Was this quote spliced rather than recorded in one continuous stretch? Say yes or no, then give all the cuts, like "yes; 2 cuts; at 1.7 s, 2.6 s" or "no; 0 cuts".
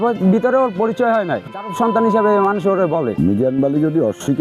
yes; 2 cuts; at 1.5 s, 3.1 s